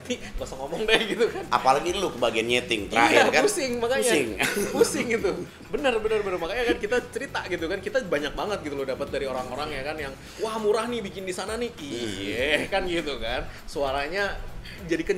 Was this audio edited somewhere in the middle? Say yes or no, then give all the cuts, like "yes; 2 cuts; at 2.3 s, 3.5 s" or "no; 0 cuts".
no; 0 cuts